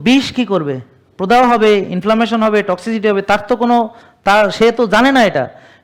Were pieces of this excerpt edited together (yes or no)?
no